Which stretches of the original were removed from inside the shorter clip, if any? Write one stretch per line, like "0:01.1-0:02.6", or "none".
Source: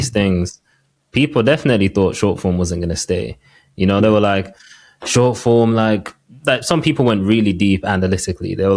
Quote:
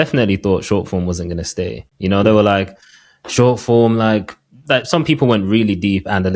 0:03.4-0:03.6